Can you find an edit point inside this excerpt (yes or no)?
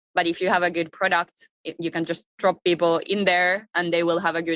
yes